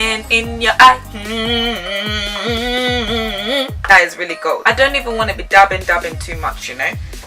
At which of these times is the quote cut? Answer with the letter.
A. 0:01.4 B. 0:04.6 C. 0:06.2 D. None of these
B